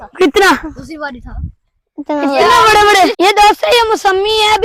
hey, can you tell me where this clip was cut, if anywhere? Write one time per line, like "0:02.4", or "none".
none